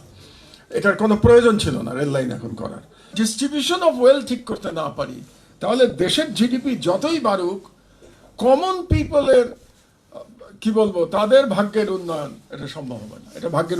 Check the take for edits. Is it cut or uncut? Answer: cut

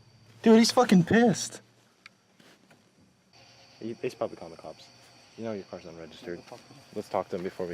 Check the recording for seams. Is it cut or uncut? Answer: cut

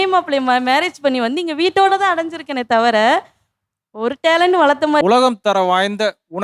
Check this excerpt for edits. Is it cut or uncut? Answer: cut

